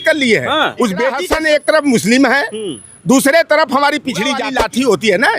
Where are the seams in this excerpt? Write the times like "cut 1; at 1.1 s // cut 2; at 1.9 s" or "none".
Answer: cut 1; at 1.2 s // cut 2; at 4.4 s